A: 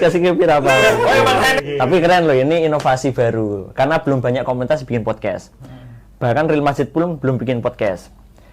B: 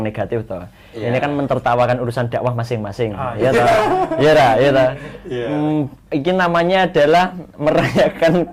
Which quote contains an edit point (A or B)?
A